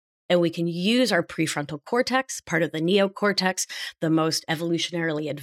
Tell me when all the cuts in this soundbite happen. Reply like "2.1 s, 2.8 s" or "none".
none